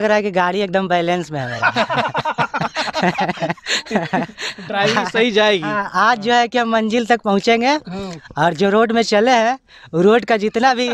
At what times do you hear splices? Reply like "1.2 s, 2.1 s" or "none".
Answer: none